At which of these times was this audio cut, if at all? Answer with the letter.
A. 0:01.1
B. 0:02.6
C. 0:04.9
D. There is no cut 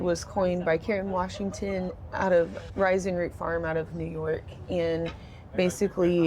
B